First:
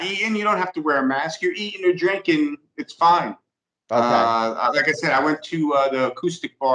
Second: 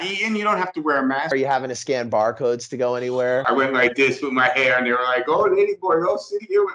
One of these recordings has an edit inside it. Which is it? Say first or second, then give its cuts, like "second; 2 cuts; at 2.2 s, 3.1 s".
second; 2 cuts; at 1.3 s, 3.5 s